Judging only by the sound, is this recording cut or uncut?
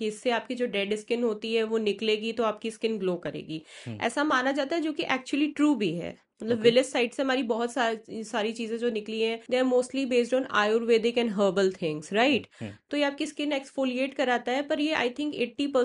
uncut